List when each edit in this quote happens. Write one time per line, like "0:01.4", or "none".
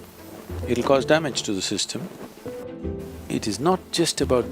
0:02.7